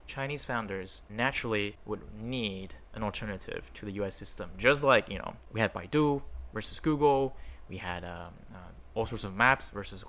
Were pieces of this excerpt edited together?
no; 0 cuts

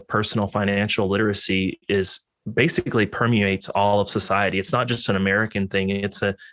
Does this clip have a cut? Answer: no; 0 cuts

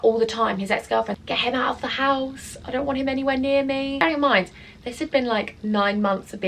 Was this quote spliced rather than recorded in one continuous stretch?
yes; 2 cuts; at 1.2 s, 4.0 s

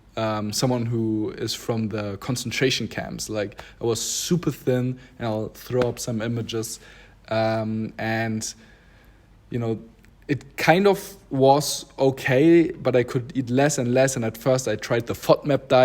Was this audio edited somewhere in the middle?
no; 0 cuts

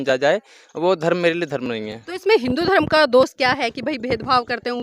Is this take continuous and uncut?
yes; 0 cuts

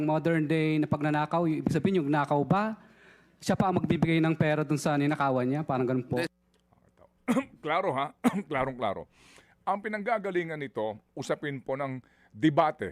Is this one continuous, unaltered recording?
yes; 0 cuts

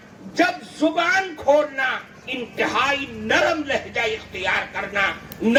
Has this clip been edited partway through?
no; 0 cuts

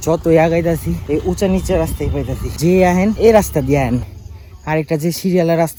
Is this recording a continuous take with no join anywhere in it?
yes; 0 cuts

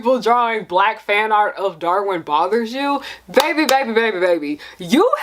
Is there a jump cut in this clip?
no; 0 cuts

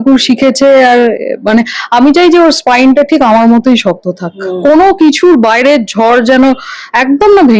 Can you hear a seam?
no; 0 cuts

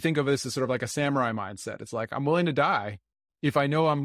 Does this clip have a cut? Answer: no; 0 cuts

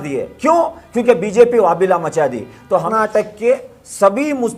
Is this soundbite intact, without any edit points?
no; 1 cut; at 2.9 s

